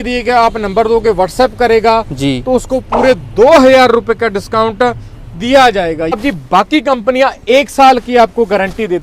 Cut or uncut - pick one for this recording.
cut